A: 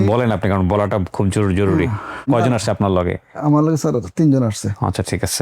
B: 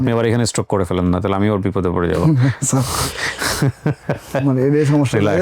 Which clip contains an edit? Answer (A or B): A